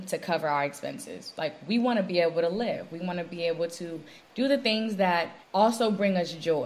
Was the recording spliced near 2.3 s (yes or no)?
no